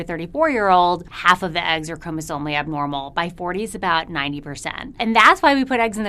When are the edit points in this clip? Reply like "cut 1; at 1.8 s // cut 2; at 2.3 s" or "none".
cut 1; at 1.1 s // cut 2; at 5.0 s